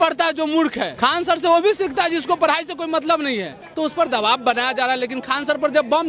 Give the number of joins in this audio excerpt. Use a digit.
2